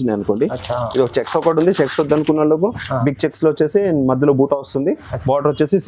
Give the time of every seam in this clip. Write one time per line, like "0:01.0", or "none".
none